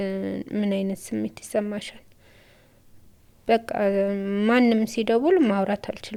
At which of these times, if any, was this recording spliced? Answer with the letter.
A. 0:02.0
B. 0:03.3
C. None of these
C